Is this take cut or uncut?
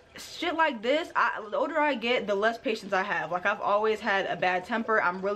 uncut